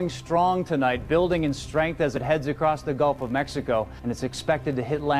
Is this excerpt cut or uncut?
uncut